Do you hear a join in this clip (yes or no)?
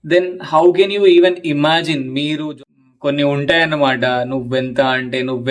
yes